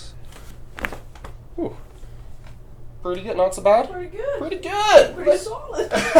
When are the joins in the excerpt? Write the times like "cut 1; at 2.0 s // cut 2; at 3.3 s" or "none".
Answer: none